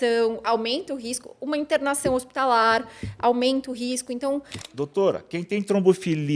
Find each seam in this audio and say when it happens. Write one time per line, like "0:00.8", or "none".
0:04.6